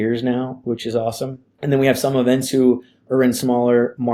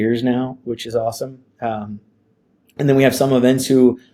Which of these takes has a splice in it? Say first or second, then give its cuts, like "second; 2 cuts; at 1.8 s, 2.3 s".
first; 1 cut; at 1.4 s